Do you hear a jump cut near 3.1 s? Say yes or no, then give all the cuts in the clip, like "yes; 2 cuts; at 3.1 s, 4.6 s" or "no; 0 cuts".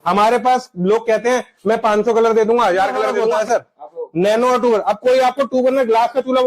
yes; 1 cut; at 3.1 s